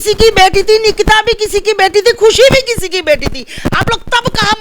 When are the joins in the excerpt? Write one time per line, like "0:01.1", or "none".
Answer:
none